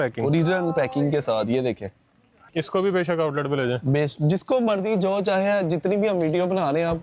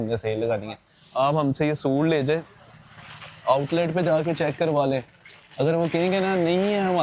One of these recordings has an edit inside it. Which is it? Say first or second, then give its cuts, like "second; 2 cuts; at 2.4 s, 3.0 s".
first; 1 cut; at 2.4 s